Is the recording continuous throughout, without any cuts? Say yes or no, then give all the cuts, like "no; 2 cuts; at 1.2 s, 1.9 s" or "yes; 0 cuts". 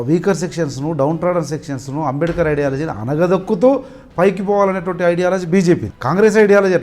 no; 1 cut; at 5.9 s